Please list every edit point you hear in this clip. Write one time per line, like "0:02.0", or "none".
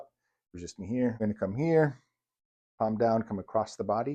0:01.2

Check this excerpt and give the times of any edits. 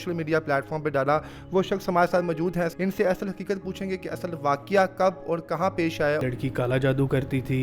0:02.7
0:06.2

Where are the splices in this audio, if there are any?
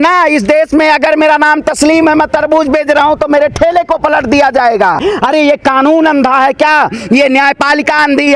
0:05.0

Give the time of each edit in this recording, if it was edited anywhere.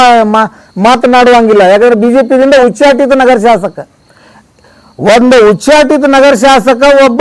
none

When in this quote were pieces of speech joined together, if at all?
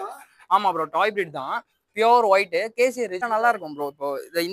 0:03.2

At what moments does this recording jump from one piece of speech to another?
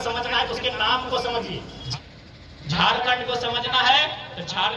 0:01.8

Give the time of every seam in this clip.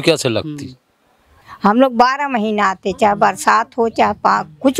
0:00.9

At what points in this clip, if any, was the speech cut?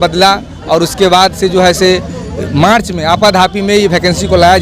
none

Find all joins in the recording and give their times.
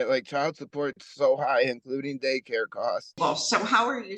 0:03.1

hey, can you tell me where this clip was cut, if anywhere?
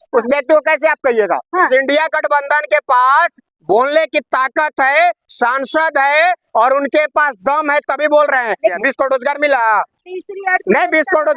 0:01.7
0:08.8

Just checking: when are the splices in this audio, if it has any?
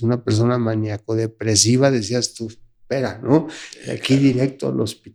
none

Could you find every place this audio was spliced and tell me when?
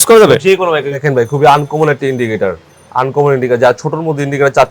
0:01.0

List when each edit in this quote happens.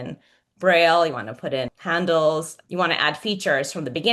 0:01.8
0:02.6

